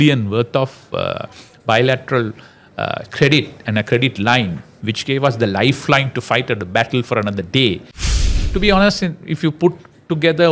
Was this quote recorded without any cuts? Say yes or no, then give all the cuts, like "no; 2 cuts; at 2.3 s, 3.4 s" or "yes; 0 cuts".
no; 1 cut; at 8.0 s